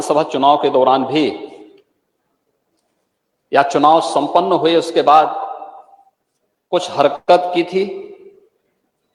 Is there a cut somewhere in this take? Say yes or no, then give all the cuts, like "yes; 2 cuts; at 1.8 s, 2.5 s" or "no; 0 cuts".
no; 0 cuts